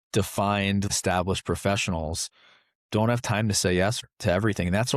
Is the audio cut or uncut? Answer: cut